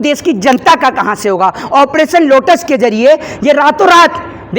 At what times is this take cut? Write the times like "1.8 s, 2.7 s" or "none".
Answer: 1.6 s